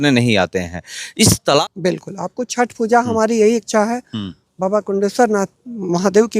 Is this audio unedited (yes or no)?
no